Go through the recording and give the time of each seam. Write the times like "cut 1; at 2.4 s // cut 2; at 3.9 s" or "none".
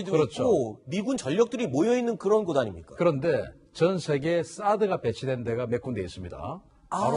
cut 1; at 1.1 s